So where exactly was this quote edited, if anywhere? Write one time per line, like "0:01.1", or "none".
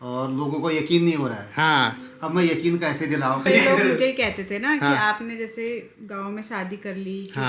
0:03.4